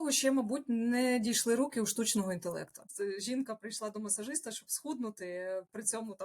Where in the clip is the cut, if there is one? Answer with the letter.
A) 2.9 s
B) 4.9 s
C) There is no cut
A